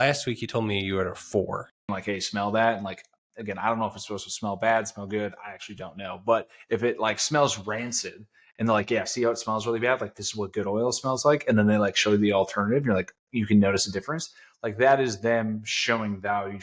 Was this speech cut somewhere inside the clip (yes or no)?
yes